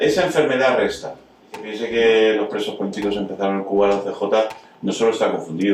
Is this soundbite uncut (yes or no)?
no